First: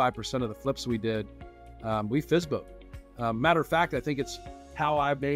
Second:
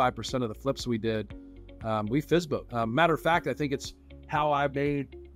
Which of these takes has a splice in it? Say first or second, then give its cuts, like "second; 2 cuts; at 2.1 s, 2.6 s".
second; 1 cut; at 2.7 s